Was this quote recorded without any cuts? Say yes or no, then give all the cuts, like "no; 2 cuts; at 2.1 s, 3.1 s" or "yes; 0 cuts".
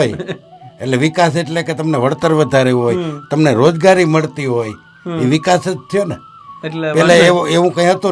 yes; 0 cuts